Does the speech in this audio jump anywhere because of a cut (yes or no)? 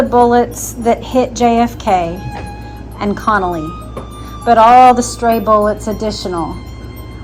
no